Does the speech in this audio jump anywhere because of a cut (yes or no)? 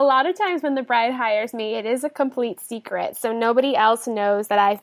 no